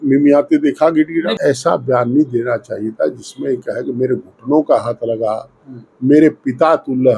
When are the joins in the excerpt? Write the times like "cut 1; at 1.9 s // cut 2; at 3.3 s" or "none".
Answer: cut 1; at 1.3 s

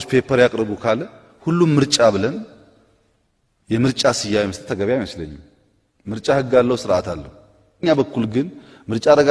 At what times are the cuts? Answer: cut 1; at 7.8 s

